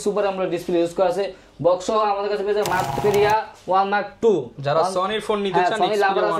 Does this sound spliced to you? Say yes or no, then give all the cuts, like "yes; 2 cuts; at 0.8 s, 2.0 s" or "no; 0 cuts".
yes; 1 cut; at 3.0 s